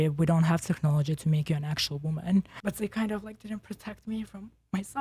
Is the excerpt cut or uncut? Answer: cut